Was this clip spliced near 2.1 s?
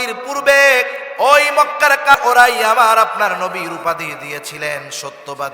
yes; 1 cut; at 2.1 s

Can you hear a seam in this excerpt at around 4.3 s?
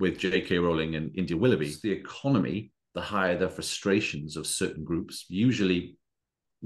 no; 1 cut; at 1.8 s

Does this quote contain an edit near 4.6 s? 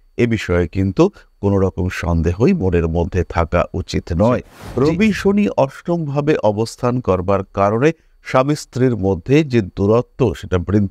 yes; 1 cut; at 4.6 s

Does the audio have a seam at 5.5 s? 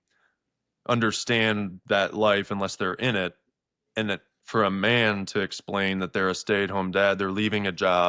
no; 0 cuts

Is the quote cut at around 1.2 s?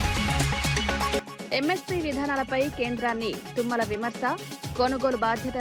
yes; 1 cut; at 1.2 s

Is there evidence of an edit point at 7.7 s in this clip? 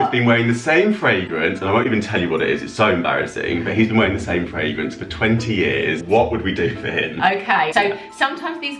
yes; 2 cuts; at 6.0 s, 7.7 s

